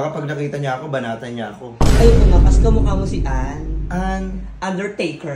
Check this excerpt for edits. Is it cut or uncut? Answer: uncut